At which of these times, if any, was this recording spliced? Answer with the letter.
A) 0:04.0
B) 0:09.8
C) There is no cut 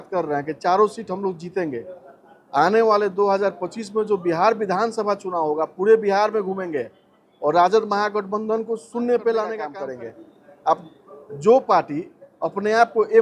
B